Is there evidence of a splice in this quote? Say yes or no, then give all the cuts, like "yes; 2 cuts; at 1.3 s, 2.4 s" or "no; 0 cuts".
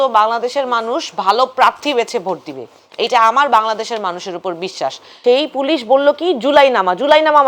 yes; 1 cut; at 5.1 s